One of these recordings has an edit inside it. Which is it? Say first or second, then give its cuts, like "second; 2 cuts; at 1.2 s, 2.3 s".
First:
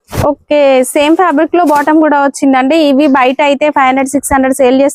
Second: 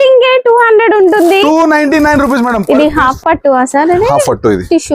second; 1 cut; at 2.6 s